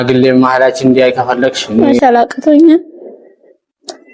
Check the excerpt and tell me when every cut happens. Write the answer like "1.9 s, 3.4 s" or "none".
1.8 s